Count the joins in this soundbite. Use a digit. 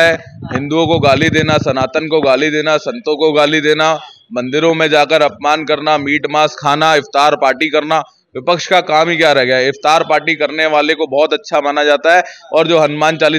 0